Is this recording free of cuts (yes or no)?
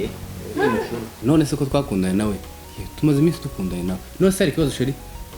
no